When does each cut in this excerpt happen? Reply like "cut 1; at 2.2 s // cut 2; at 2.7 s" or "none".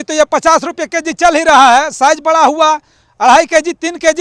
none